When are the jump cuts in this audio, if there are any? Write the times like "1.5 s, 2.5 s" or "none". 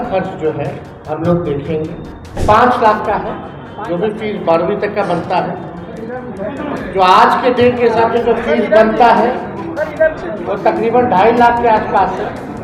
0.9 s, 2.4 s